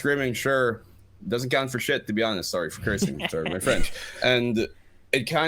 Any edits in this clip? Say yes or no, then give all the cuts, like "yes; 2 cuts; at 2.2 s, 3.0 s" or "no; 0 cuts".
no; 0 cuts